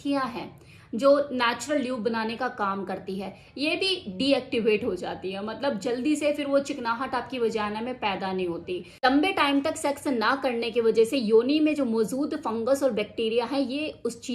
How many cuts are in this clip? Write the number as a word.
one